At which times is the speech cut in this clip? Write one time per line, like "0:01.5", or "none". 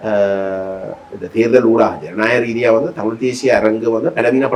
none